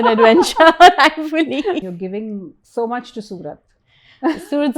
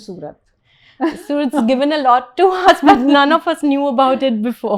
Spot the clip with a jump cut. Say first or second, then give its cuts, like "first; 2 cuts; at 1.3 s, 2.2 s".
first; 1 cut; at 1.8 s